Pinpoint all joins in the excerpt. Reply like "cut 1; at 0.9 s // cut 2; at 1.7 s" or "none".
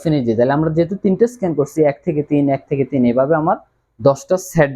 none

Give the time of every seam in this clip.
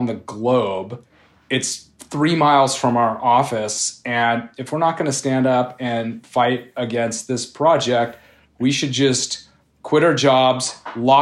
none

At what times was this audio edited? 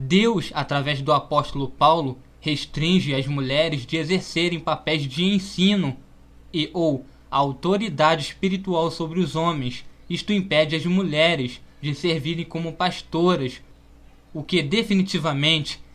cut 1; at 9.7 s

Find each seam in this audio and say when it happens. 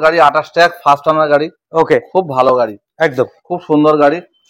none

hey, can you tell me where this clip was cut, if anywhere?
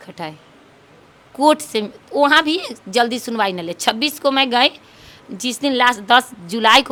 none

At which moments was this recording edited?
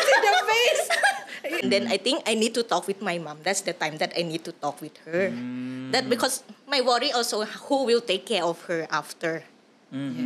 cut 1; at 1.6 s

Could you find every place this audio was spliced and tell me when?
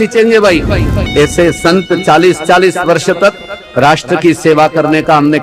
cut 1; at 1.1 s

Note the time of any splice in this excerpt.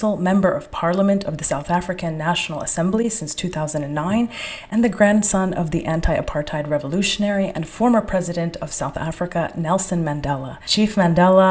none

